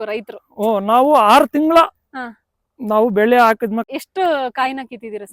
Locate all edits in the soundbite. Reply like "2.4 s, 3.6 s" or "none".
3.9 s